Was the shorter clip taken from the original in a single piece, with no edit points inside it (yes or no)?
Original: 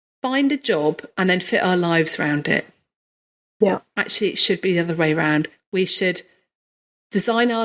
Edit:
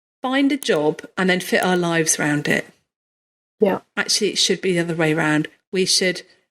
yes